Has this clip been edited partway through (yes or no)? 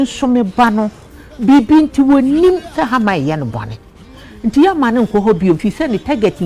no